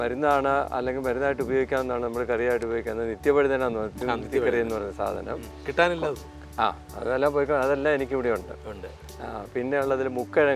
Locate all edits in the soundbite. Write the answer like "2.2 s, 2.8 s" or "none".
none